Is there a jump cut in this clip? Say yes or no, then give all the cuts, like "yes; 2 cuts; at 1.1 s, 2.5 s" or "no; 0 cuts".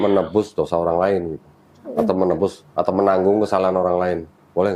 no; 0 cuts